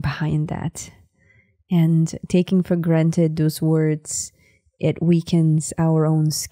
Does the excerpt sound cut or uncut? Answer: uncut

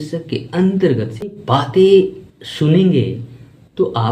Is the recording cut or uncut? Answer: cut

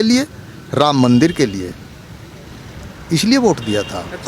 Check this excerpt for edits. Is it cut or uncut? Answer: uncut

